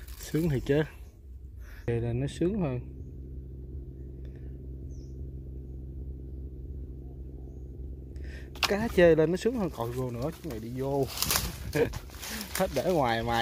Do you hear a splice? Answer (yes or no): yes